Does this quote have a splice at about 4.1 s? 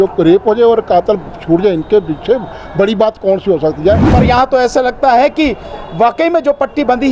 yes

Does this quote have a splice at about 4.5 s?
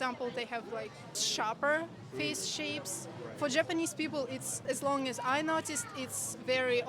yes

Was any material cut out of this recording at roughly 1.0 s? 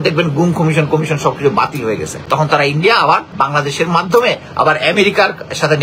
no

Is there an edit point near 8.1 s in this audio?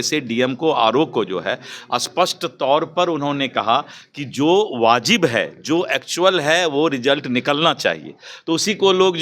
no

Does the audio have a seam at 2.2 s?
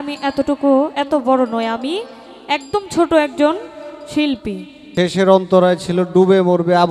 no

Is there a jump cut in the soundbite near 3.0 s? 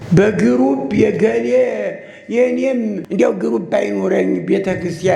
yes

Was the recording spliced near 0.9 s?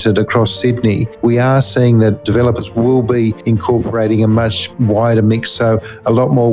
no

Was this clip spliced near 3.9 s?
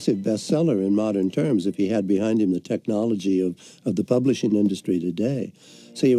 no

